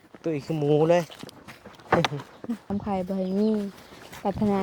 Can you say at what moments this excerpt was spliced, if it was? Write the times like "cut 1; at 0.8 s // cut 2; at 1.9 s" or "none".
cut 1; at 2.7 s